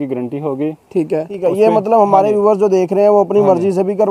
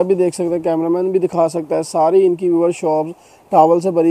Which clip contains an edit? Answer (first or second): first